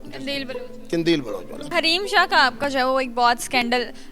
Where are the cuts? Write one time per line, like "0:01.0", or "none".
0:01.6